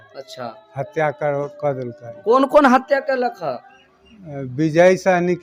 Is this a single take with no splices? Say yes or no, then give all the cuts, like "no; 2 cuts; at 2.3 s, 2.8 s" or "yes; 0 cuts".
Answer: yes; 0 cuts